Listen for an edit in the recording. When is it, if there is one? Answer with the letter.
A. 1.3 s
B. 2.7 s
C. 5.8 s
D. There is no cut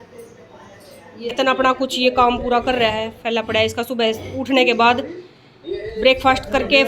A